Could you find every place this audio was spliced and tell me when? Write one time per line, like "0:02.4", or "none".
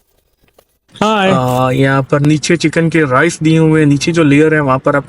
0:01.4